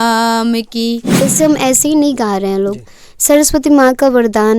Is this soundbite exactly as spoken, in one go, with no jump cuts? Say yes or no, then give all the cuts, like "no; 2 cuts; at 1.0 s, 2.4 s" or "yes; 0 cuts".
no; 1 cut; at 1.2 s